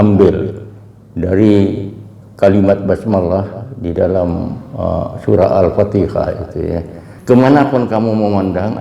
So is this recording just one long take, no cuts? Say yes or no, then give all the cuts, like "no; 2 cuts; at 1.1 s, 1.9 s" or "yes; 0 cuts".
no; 1 cut; at 7.1 s